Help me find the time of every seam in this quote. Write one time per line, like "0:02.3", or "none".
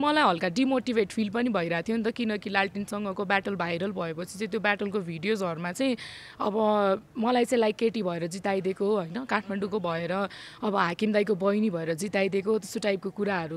none